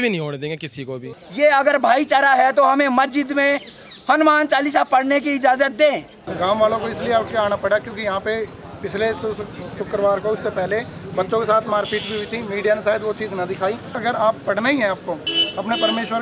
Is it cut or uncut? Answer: cut